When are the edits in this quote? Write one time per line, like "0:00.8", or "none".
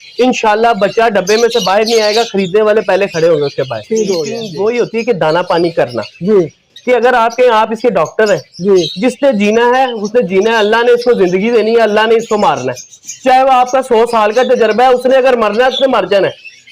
0:04.4